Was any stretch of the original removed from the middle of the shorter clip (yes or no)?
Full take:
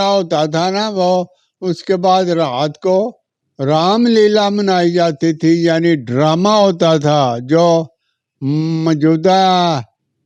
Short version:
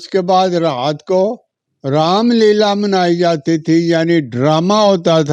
no